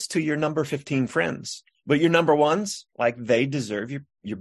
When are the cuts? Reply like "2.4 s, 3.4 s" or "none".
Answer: 1.6 s